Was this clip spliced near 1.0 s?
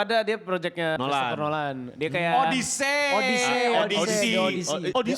yes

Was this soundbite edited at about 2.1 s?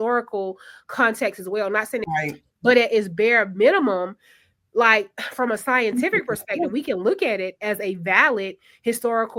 yes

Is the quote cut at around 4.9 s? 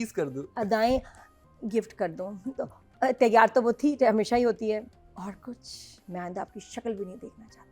yes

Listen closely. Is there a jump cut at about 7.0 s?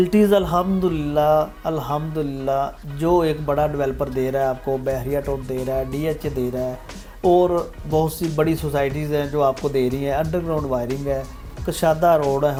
no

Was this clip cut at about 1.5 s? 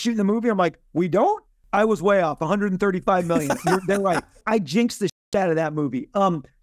yes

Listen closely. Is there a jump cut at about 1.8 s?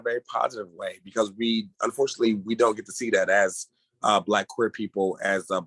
no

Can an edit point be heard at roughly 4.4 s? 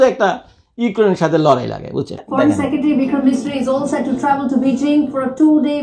no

